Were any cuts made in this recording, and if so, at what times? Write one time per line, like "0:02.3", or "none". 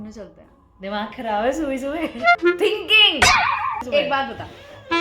0:02.4
0:03.8